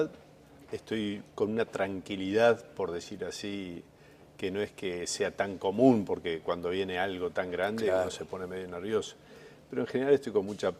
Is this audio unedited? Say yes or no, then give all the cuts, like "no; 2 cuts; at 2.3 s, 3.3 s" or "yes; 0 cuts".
no; 1 cut; at 6.3 s